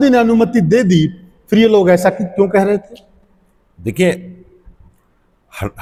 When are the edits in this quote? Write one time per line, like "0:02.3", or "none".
none